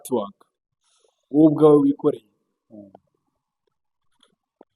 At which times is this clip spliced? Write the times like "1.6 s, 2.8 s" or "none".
none

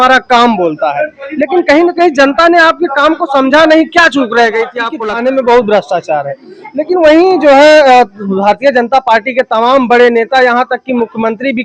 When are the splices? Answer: 4.9 s

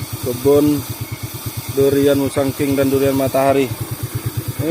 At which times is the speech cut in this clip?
none

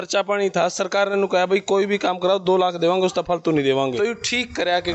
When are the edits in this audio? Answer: 3.9 s

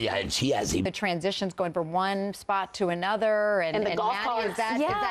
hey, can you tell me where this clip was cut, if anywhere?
1.2 s

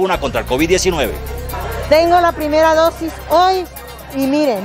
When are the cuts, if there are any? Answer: 1.4 s

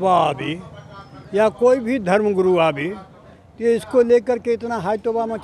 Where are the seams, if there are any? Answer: none

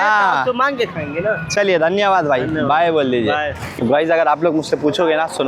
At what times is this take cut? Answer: 3.7 s

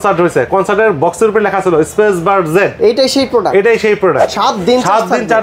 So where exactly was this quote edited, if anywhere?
4.2 s

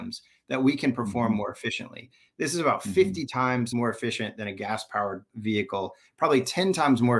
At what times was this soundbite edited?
3.7 s, 5.3 s

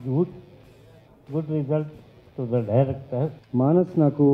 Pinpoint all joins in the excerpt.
3.4 s

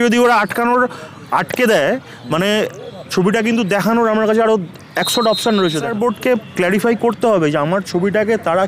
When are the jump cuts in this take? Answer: 5.9 s

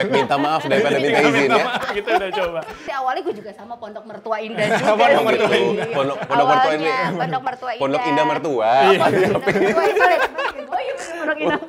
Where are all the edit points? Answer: 2.9 s

